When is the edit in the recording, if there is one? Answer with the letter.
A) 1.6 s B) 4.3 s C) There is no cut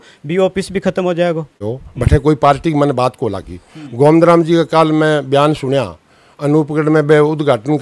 A